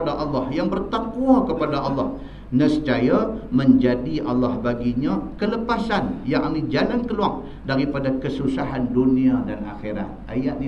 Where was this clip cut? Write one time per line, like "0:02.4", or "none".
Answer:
0:03.7